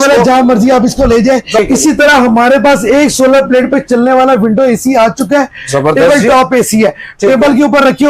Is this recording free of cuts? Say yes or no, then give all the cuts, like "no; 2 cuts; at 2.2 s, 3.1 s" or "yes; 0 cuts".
no; 1 cut; at 1.5 s